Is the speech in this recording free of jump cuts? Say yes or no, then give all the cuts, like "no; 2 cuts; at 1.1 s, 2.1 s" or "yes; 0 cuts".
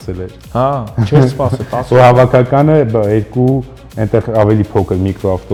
yes; 0 cuts